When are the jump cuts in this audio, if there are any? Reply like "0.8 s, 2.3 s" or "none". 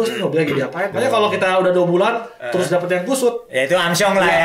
0.9 s, 3.4 s